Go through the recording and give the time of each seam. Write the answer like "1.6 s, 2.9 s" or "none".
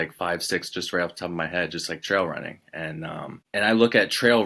3.3 s